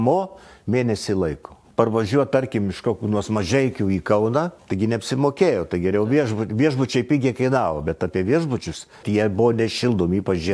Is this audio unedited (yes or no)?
no